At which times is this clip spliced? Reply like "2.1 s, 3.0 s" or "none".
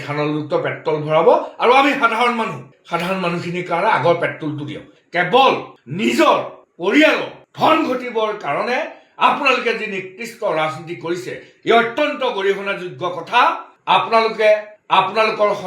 4.8 s, 13.7 s